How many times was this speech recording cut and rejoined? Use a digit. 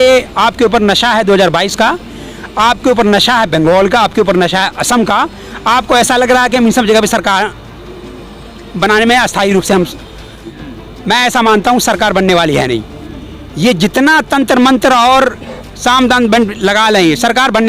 1